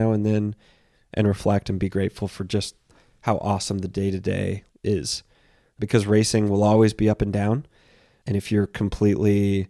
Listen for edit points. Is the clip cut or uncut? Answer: cut